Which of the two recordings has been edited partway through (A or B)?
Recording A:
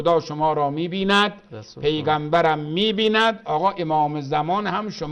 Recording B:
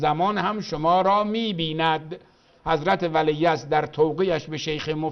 B